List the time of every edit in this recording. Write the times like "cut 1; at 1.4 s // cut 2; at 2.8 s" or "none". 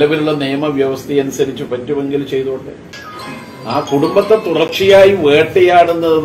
cut 1; at 2.8 s